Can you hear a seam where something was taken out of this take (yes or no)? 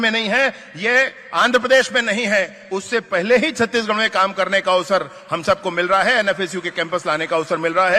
no